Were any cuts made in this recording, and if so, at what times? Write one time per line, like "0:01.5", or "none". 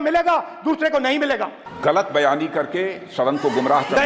0:01.6